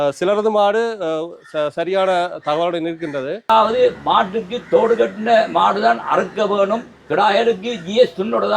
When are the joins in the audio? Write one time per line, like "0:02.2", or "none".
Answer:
0:03.5
0:07.0